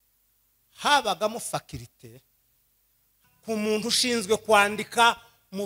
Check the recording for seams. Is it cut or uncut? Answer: cut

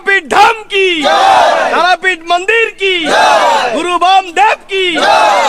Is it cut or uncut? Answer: uncut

